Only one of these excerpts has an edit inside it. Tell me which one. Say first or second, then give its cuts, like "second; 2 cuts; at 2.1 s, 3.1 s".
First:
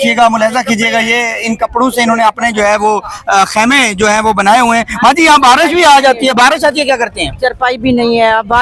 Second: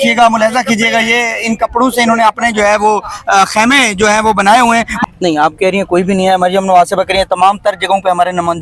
second; 1 cut; at 4.9 s